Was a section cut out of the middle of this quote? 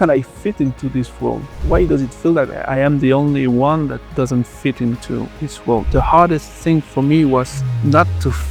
yes; 2 cuts; at 2.6 s, 5.9 s

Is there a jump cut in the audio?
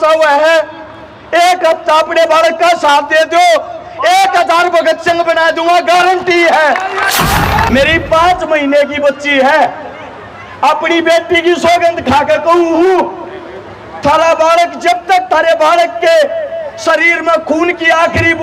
yes; 1 cut; at 7.7 s

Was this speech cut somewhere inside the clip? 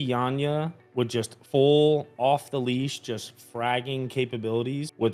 no; 0 cuts

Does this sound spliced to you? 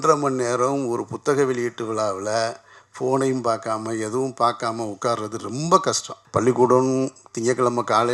yes; 1 cut; at 6.1 s

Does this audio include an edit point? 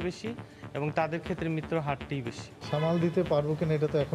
yes; 1 cut; at 2.5 s

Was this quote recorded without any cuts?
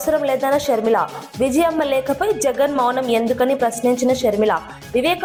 yes; 0 cuts

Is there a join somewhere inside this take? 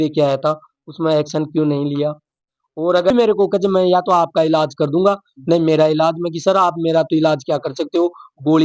yes; 1 cut; at 3.1 s

